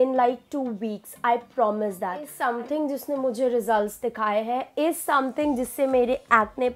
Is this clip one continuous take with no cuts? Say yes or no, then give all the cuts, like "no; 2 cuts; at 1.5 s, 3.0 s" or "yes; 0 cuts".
no; 1 cut; at 2.3 s